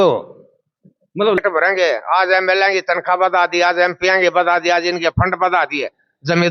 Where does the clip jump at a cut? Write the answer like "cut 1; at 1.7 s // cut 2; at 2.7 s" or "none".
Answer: cut 1; at 1.4 s